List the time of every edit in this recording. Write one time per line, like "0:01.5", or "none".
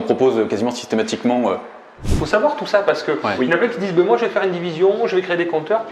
0:02.1